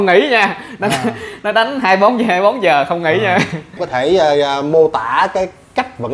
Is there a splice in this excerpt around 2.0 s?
no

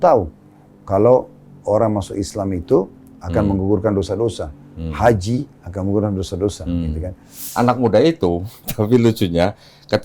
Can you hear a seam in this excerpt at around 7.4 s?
yes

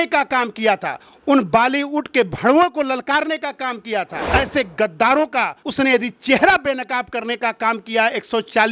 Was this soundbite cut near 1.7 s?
no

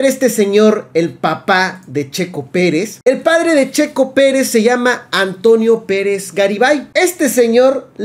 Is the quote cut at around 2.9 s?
yes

